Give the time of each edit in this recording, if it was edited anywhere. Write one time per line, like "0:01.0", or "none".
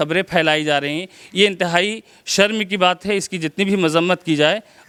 none

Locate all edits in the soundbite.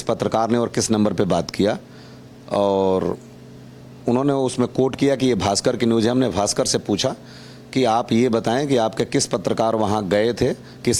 none

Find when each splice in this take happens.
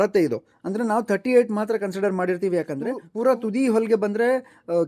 0:03.2

